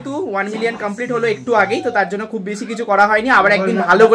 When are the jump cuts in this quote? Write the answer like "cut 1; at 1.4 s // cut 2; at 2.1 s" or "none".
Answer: none